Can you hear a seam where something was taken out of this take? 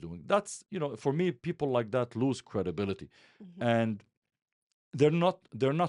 no; 0 cuts

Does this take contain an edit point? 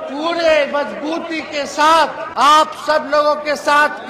yes; 1 cut; at 2.7 s

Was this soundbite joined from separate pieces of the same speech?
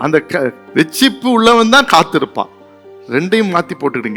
no; 0 cuts

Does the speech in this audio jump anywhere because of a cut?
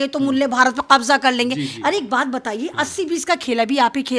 no; 0 cuts

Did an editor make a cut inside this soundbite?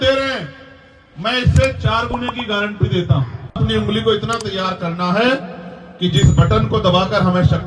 yes; 1 cut; at 3.6 s

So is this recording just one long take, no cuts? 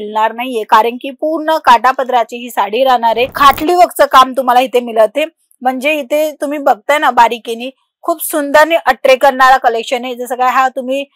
no; 1 cut; at 3.3 s

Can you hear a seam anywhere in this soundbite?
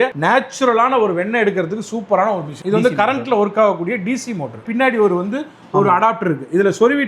yes; 2 cuts; at 2.5 s, 4.6 s

